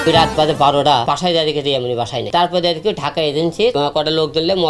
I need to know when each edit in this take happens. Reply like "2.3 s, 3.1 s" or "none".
1.0 s, 2.3 s, 3.7 s